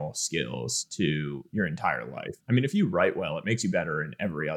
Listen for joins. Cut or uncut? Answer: uncut